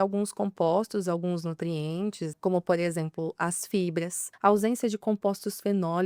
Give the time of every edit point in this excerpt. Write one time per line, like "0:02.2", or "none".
0:02.4
0:04.2